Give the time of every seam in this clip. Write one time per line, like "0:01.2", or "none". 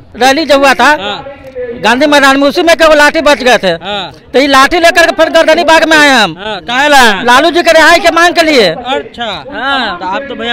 none